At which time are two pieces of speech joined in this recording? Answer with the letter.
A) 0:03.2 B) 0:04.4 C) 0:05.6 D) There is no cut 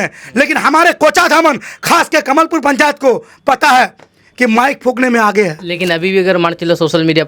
C